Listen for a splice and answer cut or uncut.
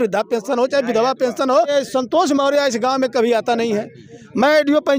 cut